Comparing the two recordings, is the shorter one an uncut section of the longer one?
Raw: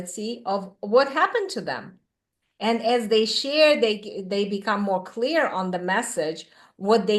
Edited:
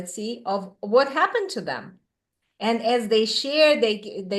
yes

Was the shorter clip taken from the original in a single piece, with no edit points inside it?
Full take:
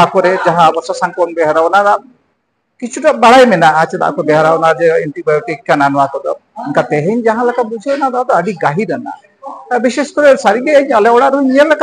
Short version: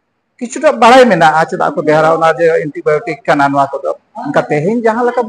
yes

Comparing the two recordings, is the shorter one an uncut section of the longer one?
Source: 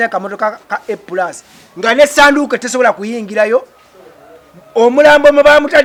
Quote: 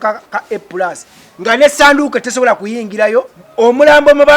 no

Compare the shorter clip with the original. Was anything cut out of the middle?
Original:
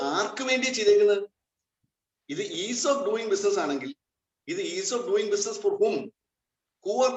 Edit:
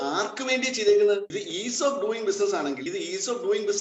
yes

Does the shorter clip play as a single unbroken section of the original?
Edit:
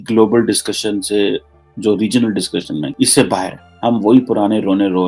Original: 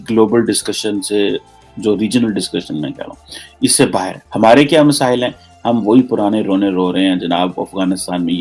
no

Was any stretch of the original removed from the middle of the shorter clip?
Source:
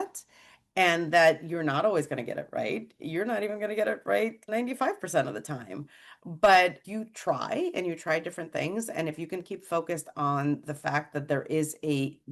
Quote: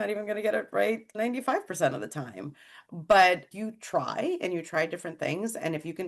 no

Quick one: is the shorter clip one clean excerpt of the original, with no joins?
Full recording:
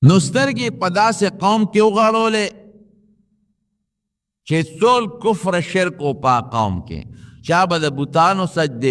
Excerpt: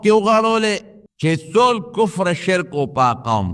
no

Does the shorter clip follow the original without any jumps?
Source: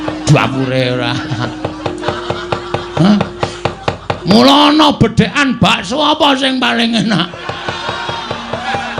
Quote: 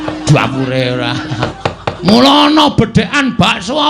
no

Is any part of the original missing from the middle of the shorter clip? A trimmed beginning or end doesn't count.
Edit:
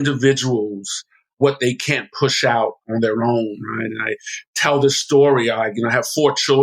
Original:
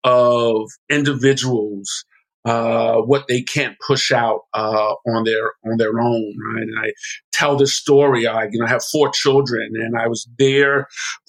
yes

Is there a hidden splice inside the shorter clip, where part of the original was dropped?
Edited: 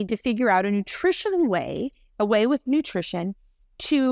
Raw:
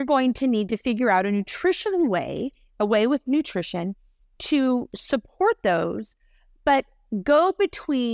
no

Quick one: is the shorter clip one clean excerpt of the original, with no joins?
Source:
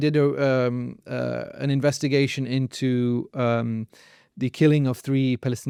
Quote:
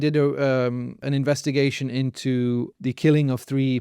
no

